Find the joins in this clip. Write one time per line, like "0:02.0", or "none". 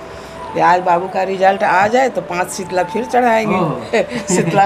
none